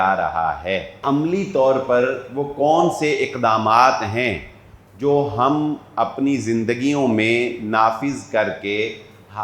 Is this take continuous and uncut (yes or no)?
no